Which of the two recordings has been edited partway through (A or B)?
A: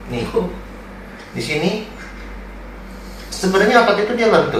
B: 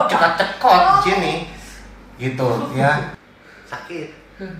B